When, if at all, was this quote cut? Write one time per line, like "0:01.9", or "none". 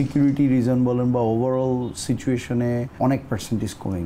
0:02.9